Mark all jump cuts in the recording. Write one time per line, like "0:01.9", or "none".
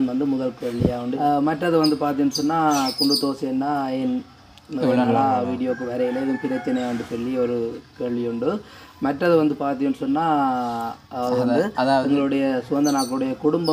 0:01.2